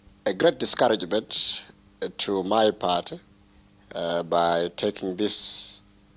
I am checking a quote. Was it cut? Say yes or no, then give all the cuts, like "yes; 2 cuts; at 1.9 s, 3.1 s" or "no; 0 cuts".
no; 0 cuts